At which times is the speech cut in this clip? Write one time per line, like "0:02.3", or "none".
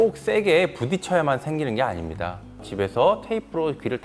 0:02.7